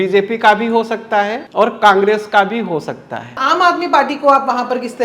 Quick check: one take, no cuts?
no; 2 cuts; at 1.4 s, 3.4 s

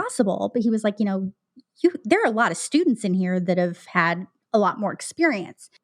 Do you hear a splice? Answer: no; 0 cuts

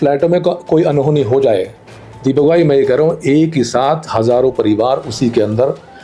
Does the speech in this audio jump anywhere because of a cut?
no; 0 cuts

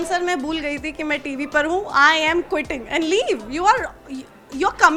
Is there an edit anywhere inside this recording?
no; 0 cuts

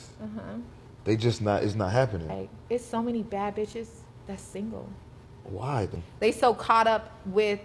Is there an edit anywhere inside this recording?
yes; 2 cuts; at 2.5 s, 6.0 s

